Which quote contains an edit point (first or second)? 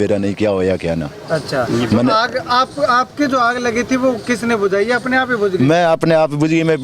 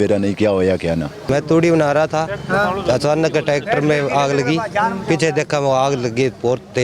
second